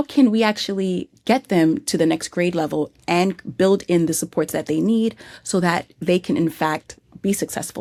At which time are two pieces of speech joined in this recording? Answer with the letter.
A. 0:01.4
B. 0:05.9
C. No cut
C